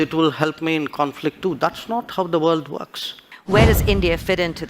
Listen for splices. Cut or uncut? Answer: cut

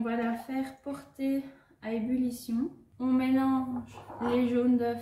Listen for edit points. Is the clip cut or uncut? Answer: cut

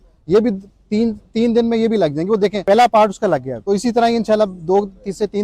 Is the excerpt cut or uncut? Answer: cut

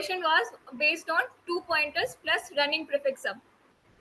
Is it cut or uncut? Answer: uncut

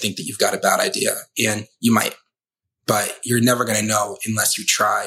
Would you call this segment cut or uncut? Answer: uncut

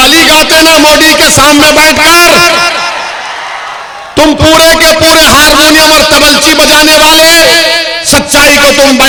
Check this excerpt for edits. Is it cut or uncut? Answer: uncut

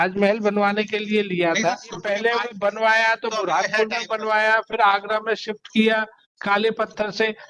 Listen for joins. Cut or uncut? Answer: cut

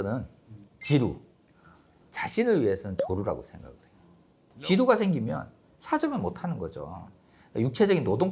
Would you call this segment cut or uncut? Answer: cut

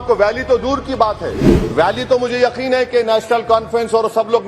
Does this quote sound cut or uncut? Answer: uncut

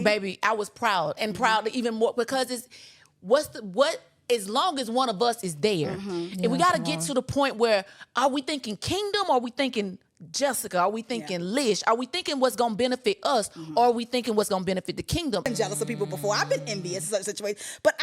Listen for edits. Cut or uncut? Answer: cut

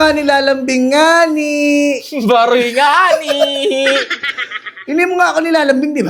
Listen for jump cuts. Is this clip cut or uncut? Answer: uncut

